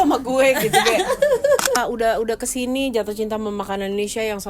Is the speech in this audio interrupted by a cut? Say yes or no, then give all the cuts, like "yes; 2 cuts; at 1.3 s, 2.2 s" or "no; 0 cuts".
yes; 1 cut; at 1.8 s